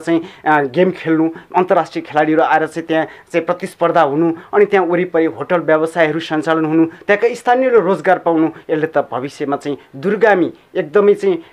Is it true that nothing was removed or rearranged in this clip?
yes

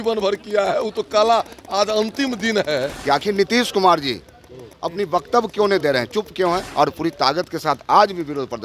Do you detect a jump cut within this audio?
yes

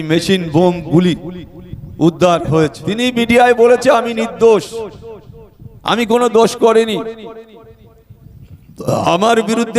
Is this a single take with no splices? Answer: no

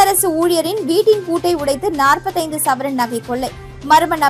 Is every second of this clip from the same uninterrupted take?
yes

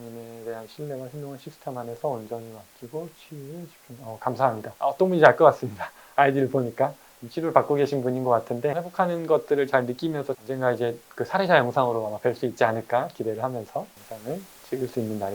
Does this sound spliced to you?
yes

